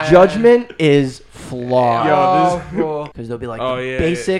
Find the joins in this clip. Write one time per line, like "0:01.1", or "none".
0:03.1